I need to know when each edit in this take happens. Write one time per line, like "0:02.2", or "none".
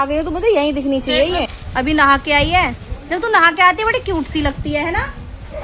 0:01.6